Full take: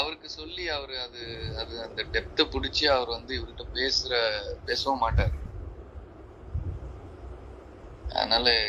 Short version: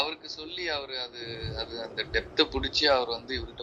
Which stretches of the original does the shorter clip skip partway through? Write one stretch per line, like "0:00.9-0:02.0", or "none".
none